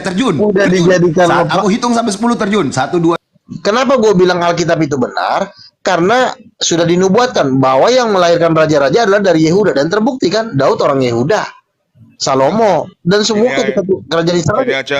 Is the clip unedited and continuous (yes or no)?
no